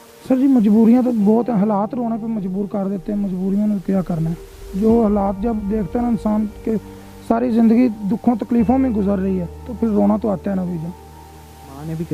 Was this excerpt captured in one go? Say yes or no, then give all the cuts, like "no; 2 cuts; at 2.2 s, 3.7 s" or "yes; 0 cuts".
yes; 0 cuts